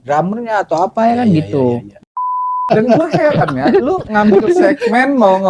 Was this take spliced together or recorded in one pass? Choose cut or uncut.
cut